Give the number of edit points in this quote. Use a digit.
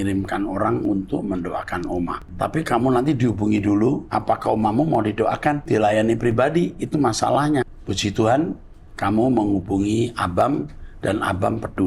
4